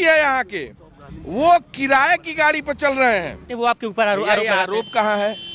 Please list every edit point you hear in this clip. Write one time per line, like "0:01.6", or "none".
0:03.5